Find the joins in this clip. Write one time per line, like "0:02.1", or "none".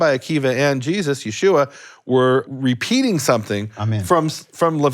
0:02.5